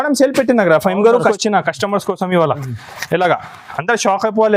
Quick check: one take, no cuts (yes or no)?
no